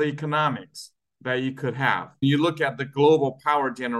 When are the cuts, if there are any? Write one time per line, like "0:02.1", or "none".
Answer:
0:02.2